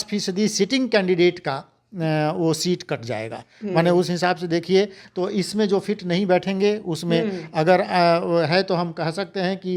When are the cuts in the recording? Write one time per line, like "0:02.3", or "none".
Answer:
none